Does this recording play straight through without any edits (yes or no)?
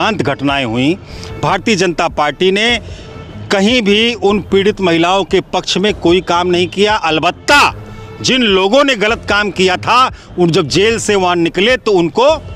yes